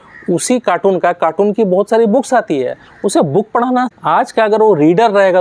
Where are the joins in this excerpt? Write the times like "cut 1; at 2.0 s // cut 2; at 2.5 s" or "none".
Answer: cut 1; at 3.9 s